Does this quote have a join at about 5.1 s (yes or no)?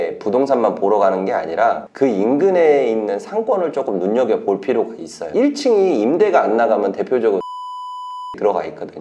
yes